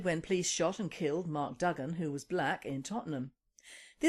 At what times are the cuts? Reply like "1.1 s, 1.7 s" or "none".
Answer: none